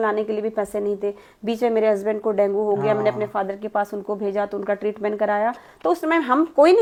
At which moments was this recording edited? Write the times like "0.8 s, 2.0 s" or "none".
none